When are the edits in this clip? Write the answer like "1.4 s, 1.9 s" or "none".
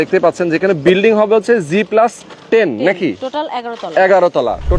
2.3 s